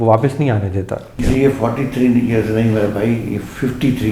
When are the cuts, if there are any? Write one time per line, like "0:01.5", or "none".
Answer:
0:01.1